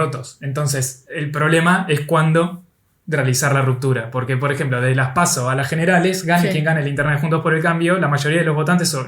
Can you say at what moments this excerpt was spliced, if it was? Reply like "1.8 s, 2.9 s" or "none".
none